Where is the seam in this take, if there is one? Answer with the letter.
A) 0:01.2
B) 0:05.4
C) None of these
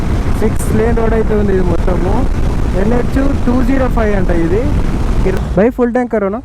B